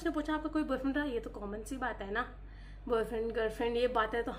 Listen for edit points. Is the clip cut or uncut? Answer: uncut